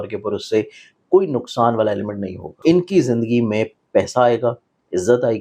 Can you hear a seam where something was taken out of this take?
yes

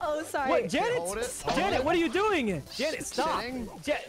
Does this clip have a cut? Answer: yes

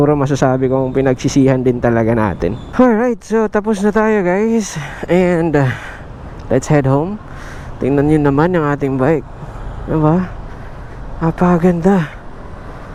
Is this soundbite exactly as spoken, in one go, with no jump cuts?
yes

